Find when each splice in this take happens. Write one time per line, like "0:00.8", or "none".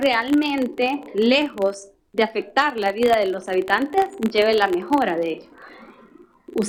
none